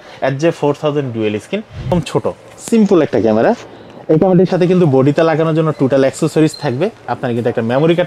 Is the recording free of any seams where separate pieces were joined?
no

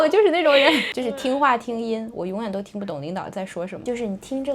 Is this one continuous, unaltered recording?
no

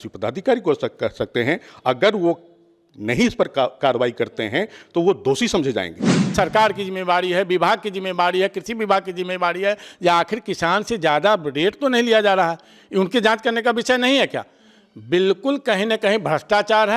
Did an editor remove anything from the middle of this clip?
yes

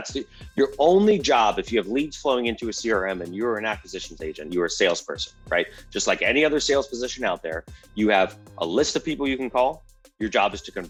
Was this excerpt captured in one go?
yes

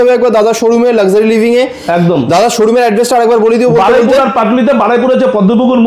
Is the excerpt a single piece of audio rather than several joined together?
yes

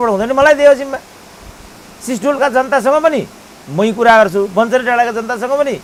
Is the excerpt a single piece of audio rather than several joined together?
yes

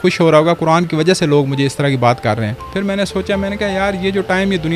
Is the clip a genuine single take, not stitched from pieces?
no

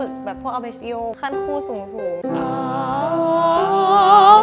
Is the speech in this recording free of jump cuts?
no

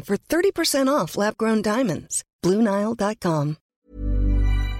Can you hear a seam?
yes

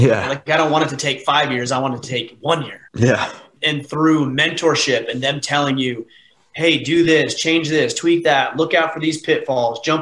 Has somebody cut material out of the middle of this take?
yes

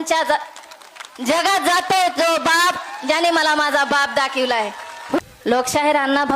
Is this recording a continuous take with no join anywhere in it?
no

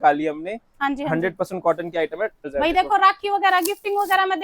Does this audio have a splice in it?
yes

